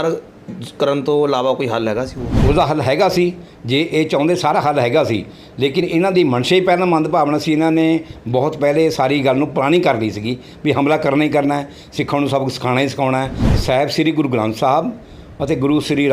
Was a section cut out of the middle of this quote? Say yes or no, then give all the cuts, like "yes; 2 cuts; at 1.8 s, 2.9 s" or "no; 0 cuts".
yes; 2 cuts; at 2.2 s, 13.4 s